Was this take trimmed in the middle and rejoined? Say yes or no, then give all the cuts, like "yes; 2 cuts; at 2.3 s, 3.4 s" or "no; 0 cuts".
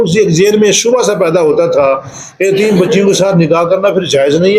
no; 0 cuts